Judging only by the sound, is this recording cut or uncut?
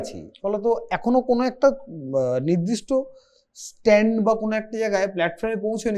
uncut